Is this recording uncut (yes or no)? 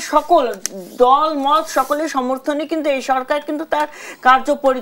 yes